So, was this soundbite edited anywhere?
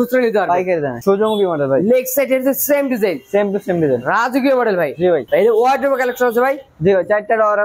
yes; 2 cuts; at 1.0 s, 5.2 s

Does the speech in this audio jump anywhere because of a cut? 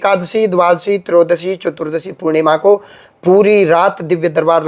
no; 0 cuts

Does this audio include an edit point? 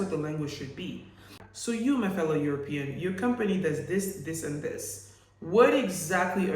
yes; 1 cut; at 1.5 s

